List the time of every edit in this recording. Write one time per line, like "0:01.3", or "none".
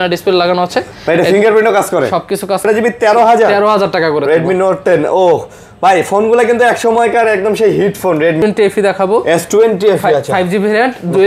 0:02.6
0:08.4